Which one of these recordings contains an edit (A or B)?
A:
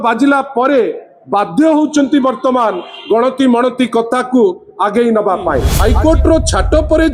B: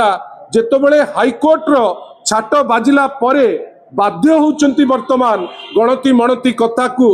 A